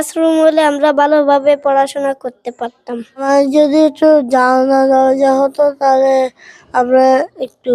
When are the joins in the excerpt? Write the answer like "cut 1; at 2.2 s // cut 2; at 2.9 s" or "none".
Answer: cut 1; at 3.1 s

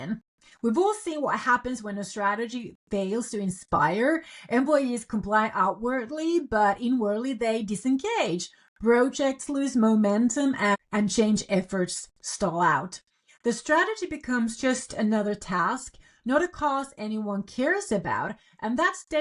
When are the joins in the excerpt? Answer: none

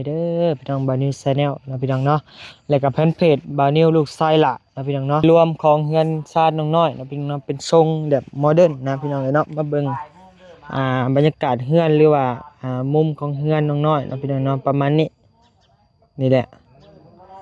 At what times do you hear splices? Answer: cut 1; at 5.2 s

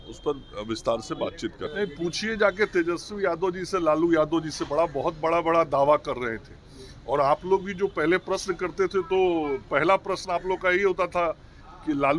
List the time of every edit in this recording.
cut 1; at 1.7 s

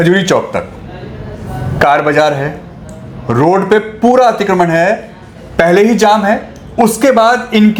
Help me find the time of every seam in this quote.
none

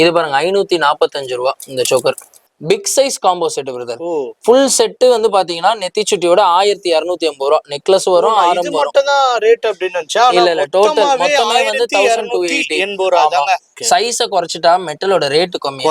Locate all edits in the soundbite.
cut 1; at 2.5 s // cut 2; at 13.7 s

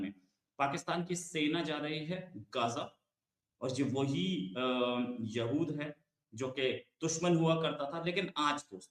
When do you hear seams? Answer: none

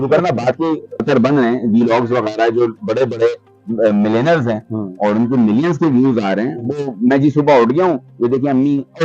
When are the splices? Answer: cut 1; at 1.0 s

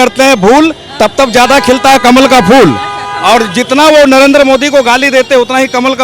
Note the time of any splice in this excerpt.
none

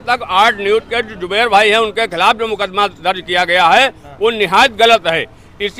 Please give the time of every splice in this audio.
none

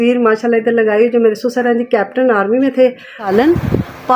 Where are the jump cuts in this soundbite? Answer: cut 1; at 3.2 s

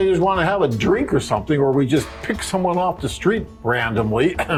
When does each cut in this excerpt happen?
none

